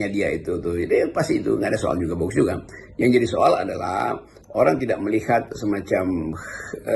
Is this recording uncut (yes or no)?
yes